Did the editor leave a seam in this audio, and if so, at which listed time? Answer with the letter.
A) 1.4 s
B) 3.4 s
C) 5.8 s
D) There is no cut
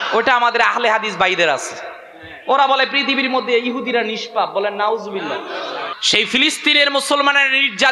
C